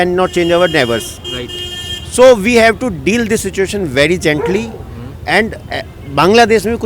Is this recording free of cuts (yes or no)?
yes